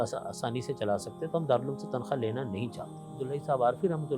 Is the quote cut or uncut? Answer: cut